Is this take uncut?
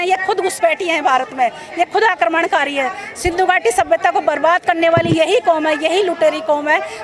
yes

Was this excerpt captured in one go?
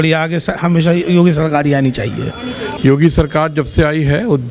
no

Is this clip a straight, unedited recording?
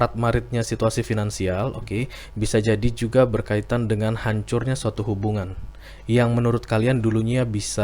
yes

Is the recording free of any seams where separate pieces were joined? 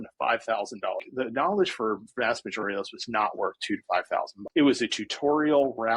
no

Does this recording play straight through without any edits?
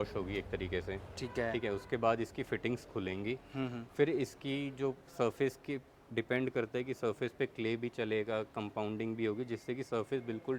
yes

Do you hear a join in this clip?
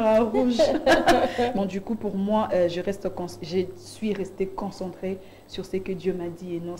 yes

